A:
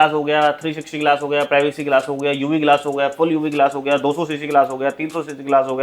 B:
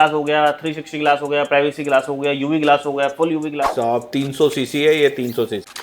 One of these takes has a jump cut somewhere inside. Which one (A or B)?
B